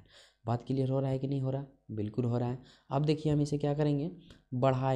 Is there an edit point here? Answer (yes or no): no